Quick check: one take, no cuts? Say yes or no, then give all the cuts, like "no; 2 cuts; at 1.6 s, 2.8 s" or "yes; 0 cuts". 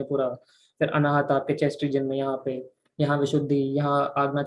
yes; 0 cuts